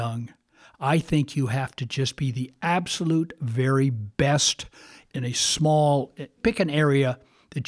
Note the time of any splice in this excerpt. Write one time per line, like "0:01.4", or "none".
none